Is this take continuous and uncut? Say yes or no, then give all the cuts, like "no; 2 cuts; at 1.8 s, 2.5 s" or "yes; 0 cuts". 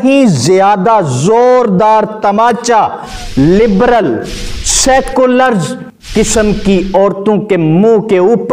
yes; 0 cuts